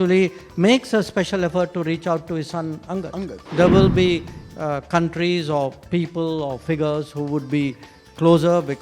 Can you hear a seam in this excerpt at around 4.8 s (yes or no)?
no